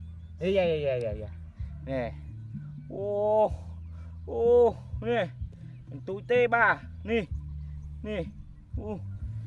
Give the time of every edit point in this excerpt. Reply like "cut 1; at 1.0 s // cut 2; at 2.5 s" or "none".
none

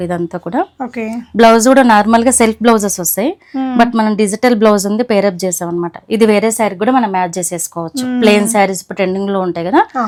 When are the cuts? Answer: none

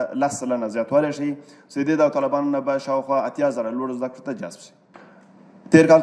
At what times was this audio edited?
none

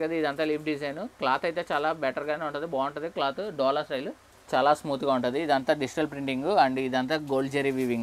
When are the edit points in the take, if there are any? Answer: cut 1; at 4.5 s

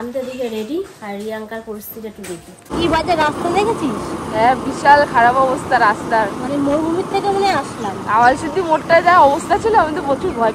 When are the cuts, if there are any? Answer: cut 1; at 2.7 s

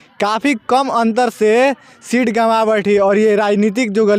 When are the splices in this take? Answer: none

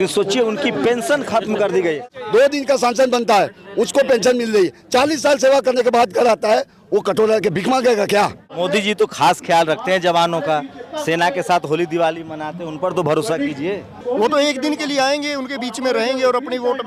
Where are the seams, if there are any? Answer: cut 1; at 2.1 s // cut 2; at 8.4 s // cut 3; at 13.9 s

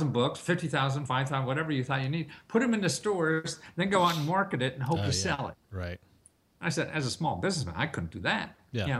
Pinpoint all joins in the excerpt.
none

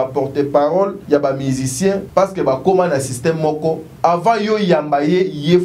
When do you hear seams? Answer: cut 1; at 1.0 s // cut 2; at 2.0 s // cut 3; at 3.9 s

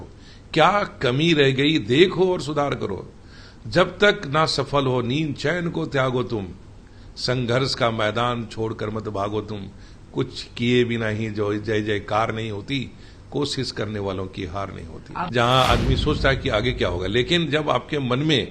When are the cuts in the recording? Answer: cut 1; at 15.3 s

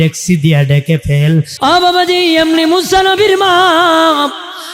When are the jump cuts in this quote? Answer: cut 1; at 1.5 s

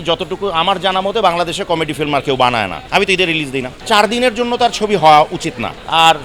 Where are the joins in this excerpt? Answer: cut 1; at 2.8 s // cut 2; at 3.7 s

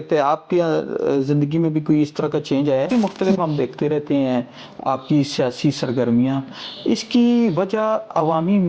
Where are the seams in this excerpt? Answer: cut 1; at 2.9 s

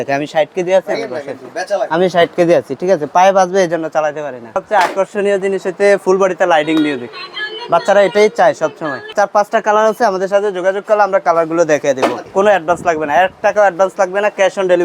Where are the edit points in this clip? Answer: cut 1; at 4.6 s // cut 2; at 9.1 s // cut 3; at 12.2 s

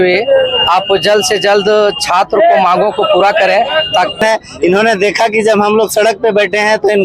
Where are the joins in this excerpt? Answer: cut 1; at 4.2 s

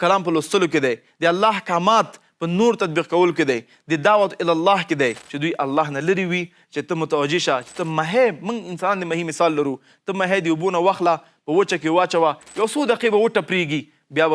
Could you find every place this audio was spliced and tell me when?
cut 1; at 5.3 s

